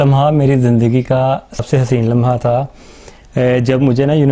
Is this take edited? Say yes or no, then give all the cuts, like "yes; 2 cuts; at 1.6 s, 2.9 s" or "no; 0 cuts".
yes; 1 cut; at 1.5 s